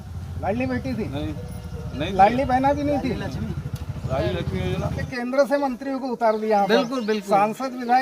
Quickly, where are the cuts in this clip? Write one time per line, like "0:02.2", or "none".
0:05.1